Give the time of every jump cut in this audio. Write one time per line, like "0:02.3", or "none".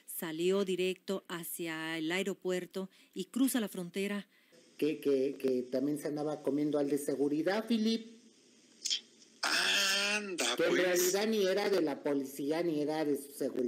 0:04.6